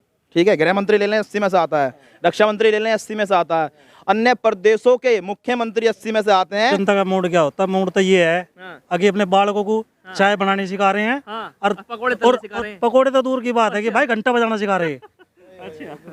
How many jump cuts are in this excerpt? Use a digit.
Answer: 1